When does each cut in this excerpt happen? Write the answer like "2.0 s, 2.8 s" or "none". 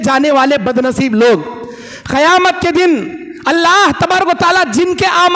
none